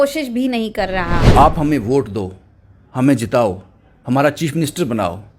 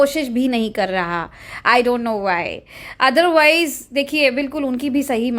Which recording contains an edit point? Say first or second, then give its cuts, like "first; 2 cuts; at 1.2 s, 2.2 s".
first; 1 cut; at 1.2 s